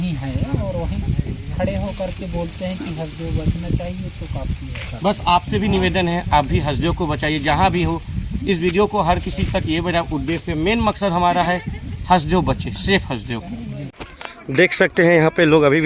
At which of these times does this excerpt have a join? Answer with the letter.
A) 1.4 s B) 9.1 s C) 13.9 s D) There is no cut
C